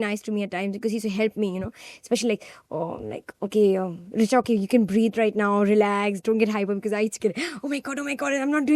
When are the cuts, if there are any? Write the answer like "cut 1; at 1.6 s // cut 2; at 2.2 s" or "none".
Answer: none